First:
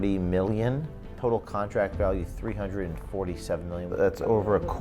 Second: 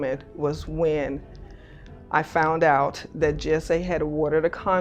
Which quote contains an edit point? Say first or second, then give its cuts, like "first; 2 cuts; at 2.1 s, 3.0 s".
first; 2 cuts; at 1.1 s, 3.9 s